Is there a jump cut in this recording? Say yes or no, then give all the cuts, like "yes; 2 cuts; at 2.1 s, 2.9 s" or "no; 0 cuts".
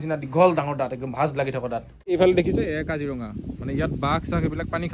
yes; 1 cut; at 2.1 s